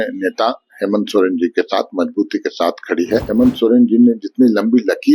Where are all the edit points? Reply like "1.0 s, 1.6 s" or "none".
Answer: 3.3 s